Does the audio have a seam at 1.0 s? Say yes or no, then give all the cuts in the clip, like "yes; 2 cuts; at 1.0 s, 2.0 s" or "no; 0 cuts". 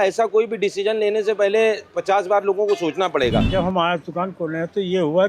no; 1 cut; at 3.5 s